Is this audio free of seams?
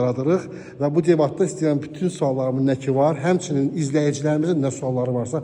yes; 0 cuts

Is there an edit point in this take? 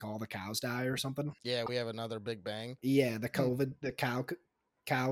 yes; 2 cuts; at 1.4 s, 2.7 s

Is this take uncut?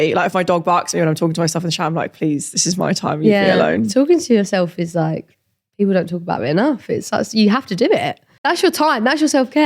no; 1 cut; at 8.6 s

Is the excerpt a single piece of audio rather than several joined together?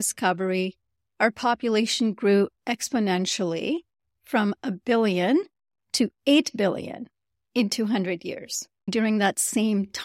no; 1 cut; at 8.9 s

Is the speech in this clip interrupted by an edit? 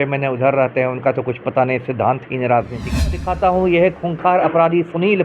yes; 1 cut; at 3.2 s

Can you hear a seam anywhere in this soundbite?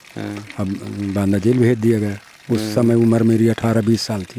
no; 0 cuts

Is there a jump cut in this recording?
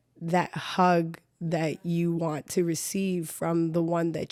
no; 0 cuts

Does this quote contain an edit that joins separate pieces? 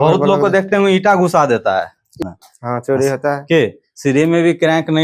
yes; 1 cut; at 2.2 s

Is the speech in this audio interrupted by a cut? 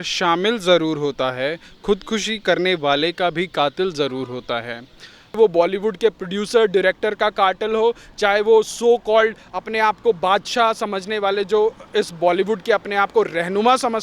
yes; 1 cut; at 5.4 s

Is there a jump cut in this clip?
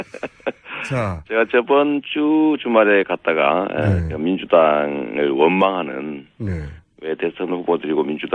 no; 0 cuts

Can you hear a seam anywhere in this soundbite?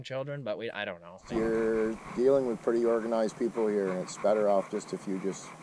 yes; 1 cut; at 1.2 s

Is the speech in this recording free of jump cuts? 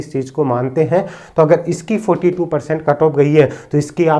yes; 0 cuts

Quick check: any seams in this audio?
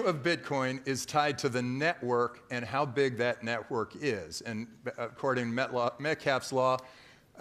no; 0 cuts

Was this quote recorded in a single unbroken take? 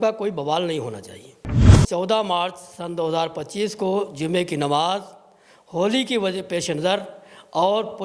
no; 1 cut; at 1.8 s

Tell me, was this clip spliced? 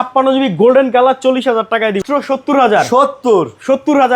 yes; 1 cut; at 2.0 s

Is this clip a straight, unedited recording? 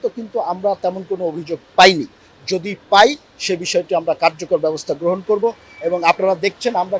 yes; 0 cuts

